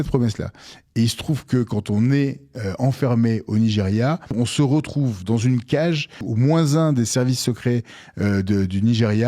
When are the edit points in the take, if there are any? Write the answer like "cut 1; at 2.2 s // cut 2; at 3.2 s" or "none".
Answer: cut 1; at 4.3 s // cut 2; at 6.2 s